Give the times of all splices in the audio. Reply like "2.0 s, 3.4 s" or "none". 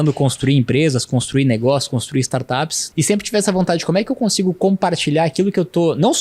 2.8 s

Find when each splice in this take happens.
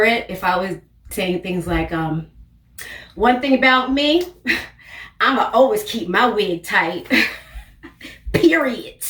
none

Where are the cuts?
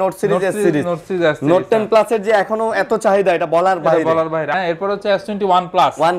4.5 s

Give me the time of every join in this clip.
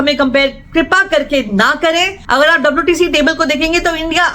2.2 s

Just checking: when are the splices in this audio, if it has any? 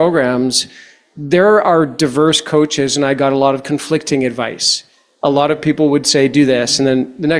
none

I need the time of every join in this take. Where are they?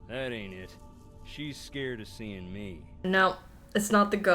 3.0 s

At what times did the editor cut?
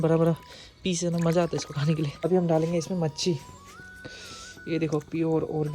2.5 s

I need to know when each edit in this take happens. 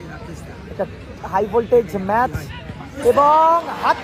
none

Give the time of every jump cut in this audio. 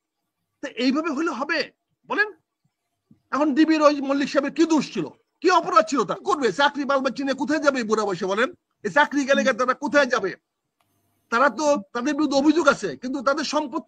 6.2 s

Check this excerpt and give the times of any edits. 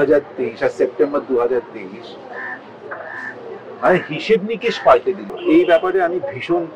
5.3 s

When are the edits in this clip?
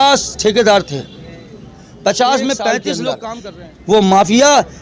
3.3 s

